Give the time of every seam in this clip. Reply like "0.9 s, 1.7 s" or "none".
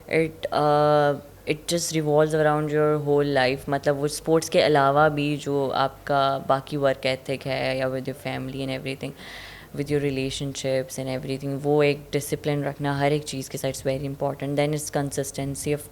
none